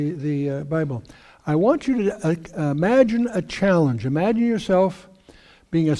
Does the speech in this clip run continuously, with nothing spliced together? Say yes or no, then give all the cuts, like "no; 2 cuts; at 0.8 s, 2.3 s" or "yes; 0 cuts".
yes; 0 cuts